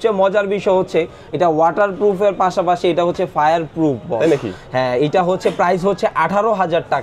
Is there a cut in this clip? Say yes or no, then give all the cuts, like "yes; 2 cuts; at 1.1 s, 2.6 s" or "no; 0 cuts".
no; 0 cuts